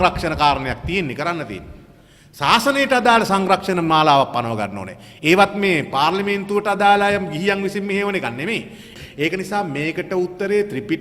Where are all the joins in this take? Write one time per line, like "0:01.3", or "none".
0:08.8